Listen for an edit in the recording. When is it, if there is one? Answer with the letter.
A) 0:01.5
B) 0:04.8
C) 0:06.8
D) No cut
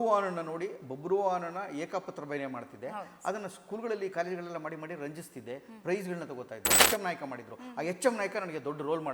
C